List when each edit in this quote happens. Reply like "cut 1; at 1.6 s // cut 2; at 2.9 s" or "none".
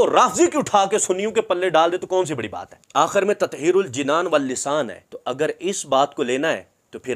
cut 1; at 2.8 s